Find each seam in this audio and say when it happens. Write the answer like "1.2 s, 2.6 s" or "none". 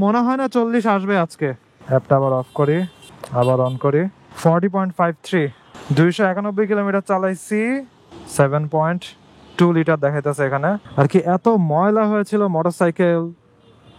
1.7 s, 10.8 s